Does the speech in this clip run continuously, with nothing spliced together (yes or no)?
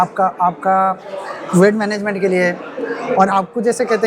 yes